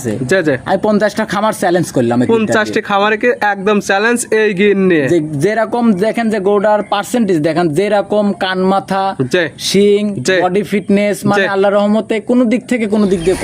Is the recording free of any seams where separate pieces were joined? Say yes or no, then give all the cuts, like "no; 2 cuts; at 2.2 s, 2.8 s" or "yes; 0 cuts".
yes; 0 cuts